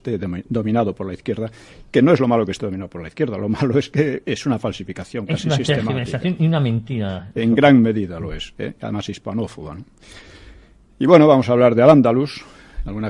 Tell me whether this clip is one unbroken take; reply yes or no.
no